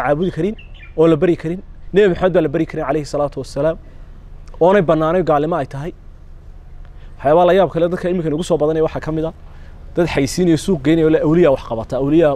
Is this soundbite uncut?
yes; 0 cuts

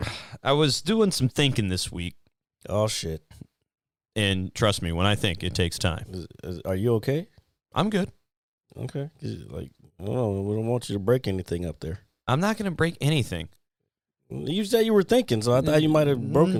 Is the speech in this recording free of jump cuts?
yes; 0 cuts

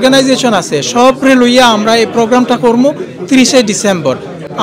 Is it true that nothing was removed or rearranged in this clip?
yes; 0 cuts

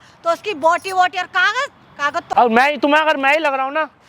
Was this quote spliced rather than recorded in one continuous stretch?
yes; 1 cut; at 2.3 s

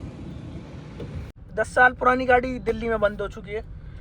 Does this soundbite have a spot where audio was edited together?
yes; 1 cut; at 1.3 s

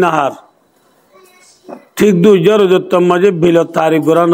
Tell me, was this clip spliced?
no; 0 cuts

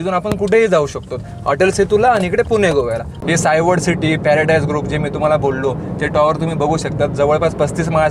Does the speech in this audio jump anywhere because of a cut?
yes; 1 cut; at 3.1 s

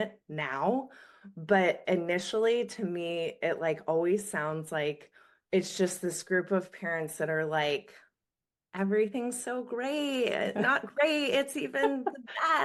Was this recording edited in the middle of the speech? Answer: no; 0 cuts

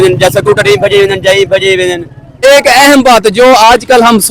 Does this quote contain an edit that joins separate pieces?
yes; 1 cut; at 2.3 s

